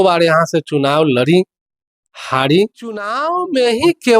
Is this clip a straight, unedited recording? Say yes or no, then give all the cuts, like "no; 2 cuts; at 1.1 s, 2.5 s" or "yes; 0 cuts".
no; 1 cut; at 3.3 s